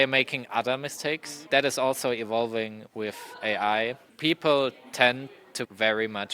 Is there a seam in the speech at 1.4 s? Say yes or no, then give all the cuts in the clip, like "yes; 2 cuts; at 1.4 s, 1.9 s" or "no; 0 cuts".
yes; 1 cut; at 1.4 s